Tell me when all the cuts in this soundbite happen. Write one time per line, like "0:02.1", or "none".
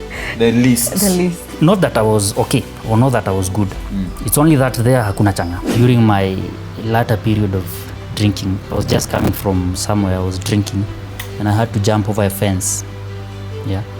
0:01.4
0:05.6
0:08.6